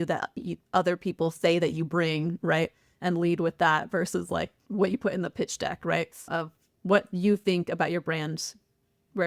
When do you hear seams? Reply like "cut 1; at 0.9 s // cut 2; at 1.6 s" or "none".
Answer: cut 1; at 4.6 s // cut 2; at 6.7 s